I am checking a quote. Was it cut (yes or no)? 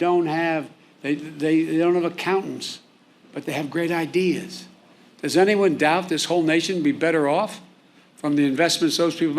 no